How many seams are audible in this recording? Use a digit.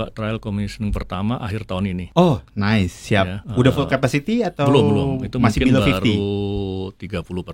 2